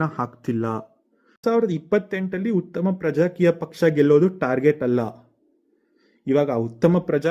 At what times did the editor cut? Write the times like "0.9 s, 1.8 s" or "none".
1.4 s